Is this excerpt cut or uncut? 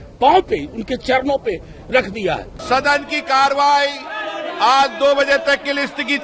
cut